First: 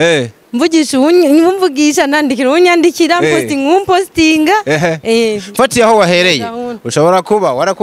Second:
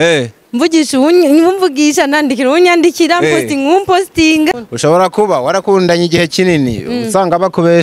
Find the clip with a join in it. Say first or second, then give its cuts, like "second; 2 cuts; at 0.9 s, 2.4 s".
second; 1 cut; at 4.5 s